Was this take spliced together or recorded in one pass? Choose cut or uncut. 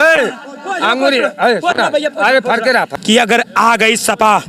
cut